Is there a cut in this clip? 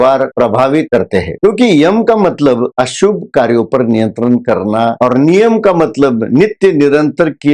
yes; 1 cut; at 4.9 s

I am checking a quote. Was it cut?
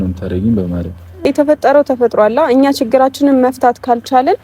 yes; 1 cut; at 1.2 s

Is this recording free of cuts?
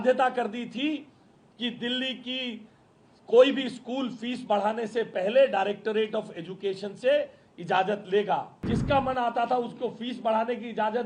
no; 1 cut; at 8.5 s

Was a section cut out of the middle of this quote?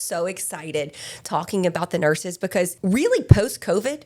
yes; 1 cut; at 2.8 s

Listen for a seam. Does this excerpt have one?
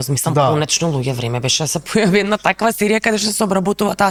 no; 0 cuts

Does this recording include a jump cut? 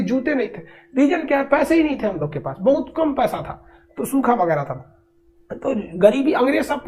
no; 0 cuts

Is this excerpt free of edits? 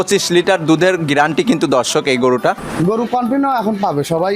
no; 1 cut; at 2.7 s

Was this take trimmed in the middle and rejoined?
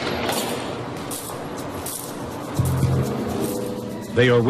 no; 0 cuts

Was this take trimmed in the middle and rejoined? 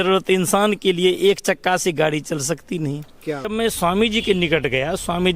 yes; 1 cut; at 3.5 s

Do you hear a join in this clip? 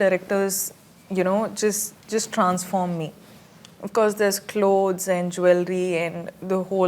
no; 0 cuts

